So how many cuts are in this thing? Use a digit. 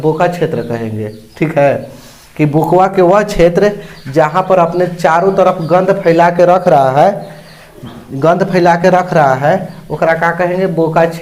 0